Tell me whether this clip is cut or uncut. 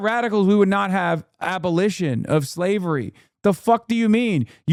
uncut